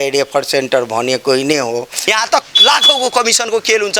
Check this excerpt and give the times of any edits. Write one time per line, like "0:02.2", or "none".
0:02.0